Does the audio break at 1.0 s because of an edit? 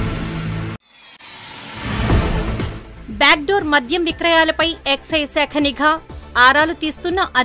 yes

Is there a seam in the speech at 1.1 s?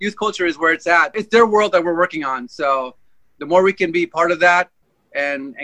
yes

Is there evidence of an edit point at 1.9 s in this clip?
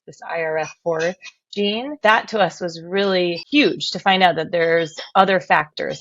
yes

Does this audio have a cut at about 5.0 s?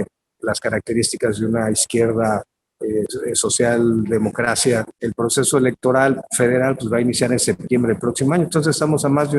yes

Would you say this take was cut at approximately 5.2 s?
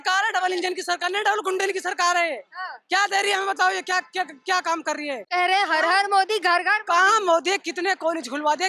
yes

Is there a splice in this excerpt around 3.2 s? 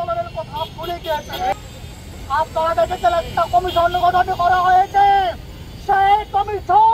no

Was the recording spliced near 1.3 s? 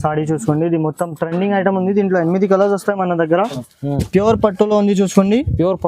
no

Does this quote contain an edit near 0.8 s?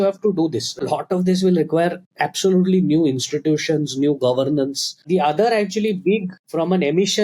yes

